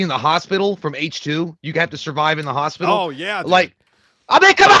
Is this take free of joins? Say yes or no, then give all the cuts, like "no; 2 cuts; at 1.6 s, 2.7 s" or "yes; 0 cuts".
yes; 0 cuts